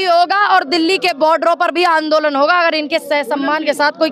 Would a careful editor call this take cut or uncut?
uncut